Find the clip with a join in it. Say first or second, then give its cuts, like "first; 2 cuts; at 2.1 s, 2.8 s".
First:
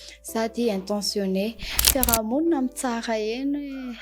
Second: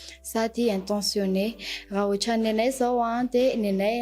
first; 1 cut; at 1.8 s